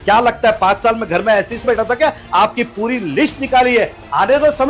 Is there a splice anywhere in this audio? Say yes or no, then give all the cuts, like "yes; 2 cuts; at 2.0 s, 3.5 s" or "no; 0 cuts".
yes; 1 cut; at 1.6 s